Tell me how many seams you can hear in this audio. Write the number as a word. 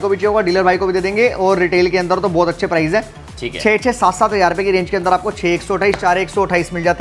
zero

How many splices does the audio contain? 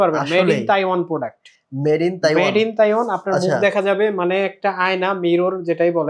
zero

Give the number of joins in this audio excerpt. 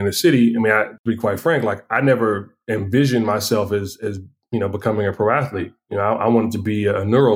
one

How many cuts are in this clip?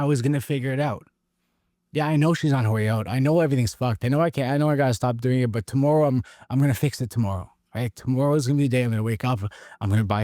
zero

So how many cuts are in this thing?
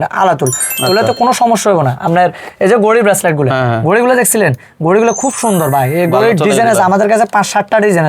zero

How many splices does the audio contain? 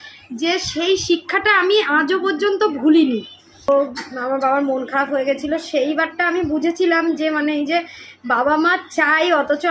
one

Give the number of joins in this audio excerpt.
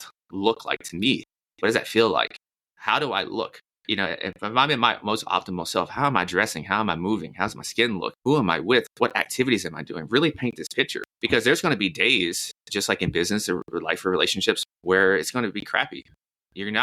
three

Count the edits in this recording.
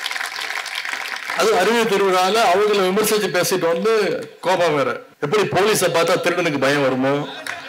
one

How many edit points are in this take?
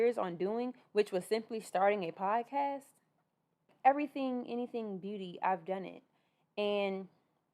one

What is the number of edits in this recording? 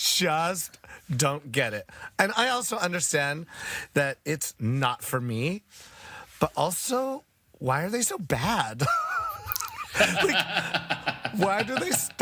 zero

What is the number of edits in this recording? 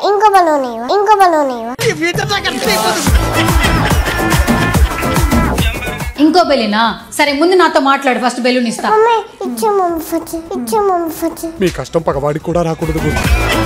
zero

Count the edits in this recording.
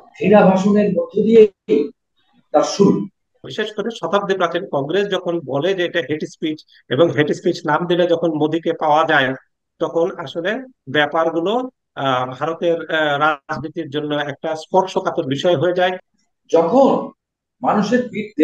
two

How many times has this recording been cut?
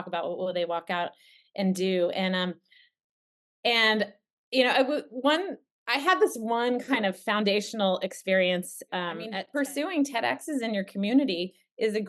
one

